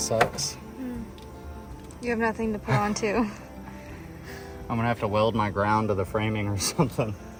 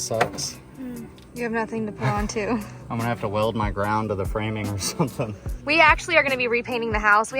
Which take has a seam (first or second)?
second